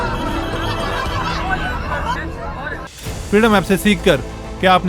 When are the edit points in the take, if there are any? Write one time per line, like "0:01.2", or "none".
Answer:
0:03.0